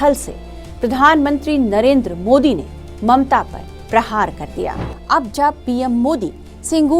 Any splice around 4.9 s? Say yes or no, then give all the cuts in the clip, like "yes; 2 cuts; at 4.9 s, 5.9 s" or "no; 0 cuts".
yes; 1 cut; at 4.9 s